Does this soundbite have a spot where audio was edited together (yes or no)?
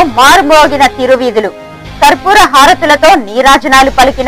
no